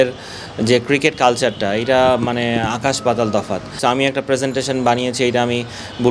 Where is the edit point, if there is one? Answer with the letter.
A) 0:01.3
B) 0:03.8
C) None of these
B